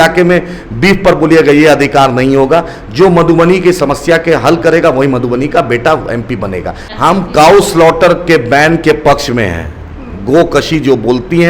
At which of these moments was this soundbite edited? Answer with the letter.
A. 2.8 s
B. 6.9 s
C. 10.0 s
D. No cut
B